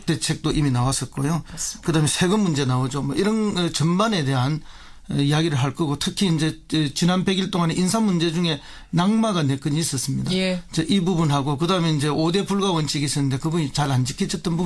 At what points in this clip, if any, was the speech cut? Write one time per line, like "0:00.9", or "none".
none